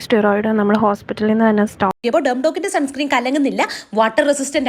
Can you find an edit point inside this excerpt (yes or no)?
yes